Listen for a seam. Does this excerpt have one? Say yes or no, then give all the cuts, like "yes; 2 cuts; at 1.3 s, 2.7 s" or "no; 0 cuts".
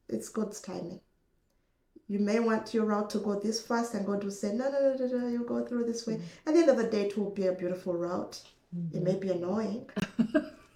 no; 0 cuts